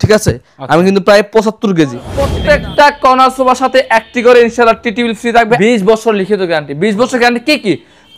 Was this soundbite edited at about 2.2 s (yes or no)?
yes